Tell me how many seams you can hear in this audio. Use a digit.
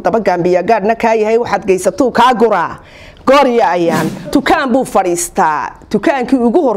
1